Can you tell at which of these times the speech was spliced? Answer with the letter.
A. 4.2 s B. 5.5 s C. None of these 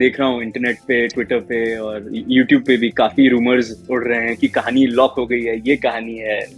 C